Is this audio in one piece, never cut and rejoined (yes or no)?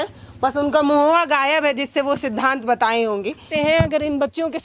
no